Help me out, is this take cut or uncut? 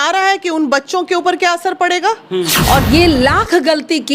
cut